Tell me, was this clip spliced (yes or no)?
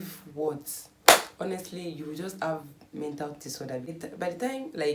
yes